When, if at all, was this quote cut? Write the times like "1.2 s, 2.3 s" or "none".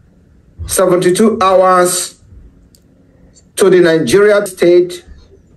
4.5 s